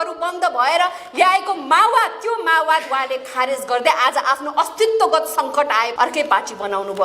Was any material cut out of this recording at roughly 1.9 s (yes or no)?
no